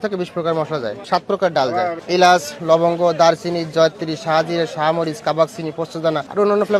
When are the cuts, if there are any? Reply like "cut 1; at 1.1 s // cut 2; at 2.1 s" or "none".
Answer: none